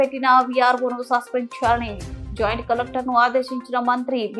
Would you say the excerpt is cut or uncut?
uncut